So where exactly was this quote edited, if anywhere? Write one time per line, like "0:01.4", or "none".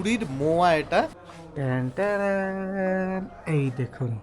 0:01.2

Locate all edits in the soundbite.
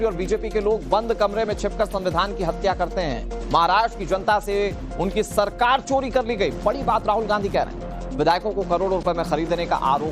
0:06.0

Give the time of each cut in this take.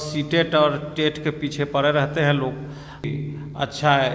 0:03.1

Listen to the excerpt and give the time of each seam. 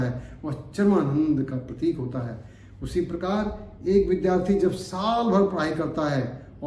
none

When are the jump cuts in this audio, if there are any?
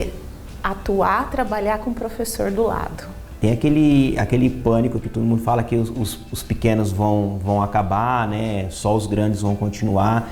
0:03.4

